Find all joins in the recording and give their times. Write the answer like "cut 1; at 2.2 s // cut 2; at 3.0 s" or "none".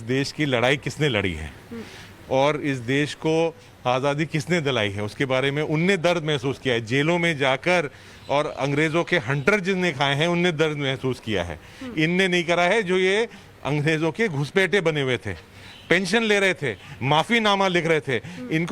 cut 1; at 7.0 s